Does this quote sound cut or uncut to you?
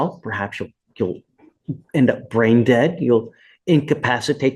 uncut